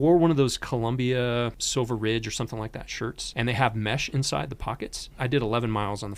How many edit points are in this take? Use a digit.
3